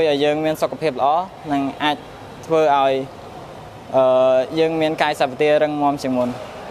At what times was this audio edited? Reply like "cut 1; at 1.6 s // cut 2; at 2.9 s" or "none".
none